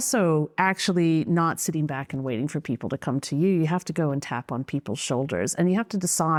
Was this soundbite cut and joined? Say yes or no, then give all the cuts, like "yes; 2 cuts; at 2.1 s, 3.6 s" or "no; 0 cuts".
no; 0 cuts